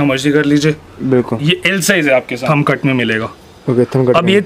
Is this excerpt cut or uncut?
cut